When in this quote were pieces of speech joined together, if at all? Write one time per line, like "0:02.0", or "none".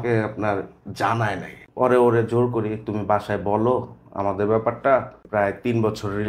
0:01.6
0:05.2